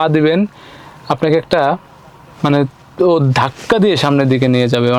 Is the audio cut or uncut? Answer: uncut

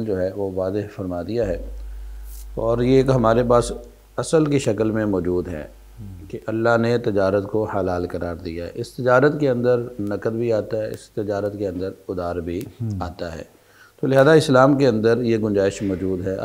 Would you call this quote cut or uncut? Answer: uncut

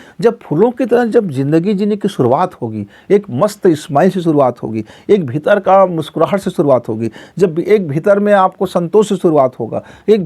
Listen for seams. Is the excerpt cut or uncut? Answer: uncut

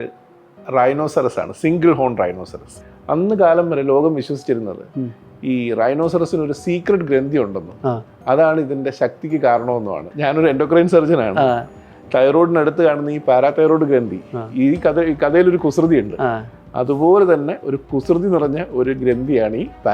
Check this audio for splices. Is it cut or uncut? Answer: cut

